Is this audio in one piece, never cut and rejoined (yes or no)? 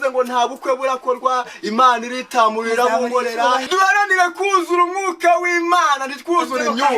no